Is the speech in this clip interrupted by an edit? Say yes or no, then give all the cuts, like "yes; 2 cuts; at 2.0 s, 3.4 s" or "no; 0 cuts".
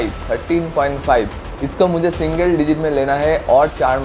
no; 0 cuts